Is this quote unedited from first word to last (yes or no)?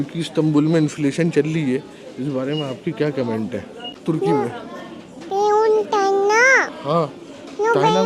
no